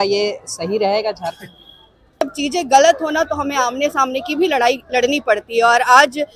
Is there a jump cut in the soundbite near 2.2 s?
yes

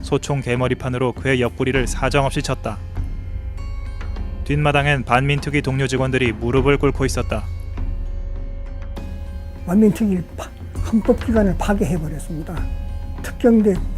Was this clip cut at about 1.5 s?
yes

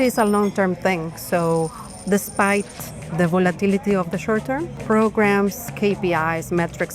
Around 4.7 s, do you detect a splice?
yes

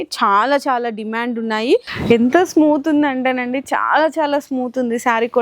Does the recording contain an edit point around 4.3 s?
no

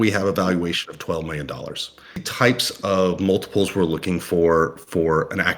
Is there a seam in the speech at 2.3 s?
yes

